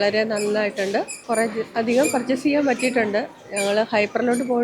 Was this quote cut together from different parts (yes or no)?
yes